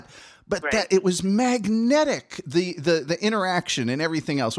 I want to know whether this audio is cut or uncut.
uncut